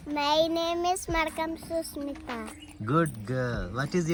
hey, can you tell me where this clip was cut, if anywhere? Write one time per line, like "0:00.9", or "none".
none